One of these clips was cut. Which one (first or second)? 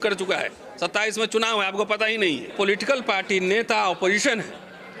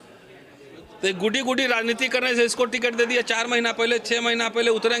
first